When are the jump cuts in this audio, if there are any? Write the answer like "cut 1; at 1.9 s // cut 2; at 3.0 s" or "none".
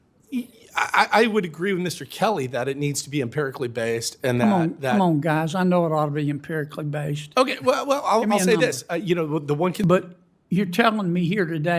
cut 1; at 9.8 s